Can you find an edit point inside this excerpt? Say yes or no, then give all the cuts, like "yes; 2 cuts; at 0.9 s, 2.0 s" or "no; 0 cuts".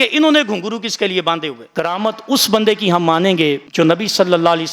yes; 1 cut; at 1.6 s